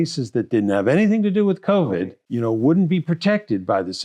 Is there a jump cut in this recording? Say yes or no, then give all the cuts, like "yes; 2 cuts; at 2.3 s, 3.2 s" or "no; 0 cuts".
yes; 1 cut; at 2.2 s